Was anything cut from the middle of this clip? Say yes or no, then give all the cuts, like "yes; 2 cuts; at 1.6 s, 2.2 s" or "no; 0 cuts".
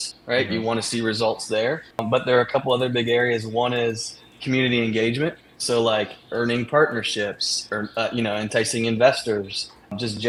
no; 0 cuts